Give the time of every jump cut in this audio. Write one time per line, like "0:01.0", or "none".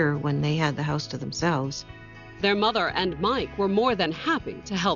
none